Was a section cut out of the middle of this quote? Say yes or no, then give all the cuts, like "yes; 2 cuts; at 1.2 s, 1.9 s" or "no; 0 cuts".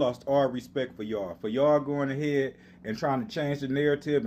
no; 0 cuts